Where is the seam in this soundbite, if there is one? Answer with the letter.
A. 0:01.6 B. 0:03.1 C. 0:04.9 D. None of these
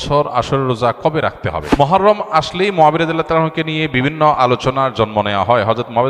A